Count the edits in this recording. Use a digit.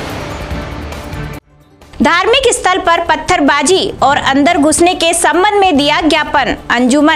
1